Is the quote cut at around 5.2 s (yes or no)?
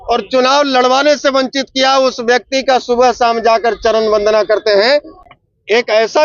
yes